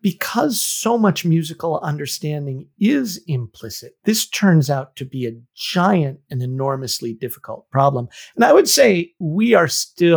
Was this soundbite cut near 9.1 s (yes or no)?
yes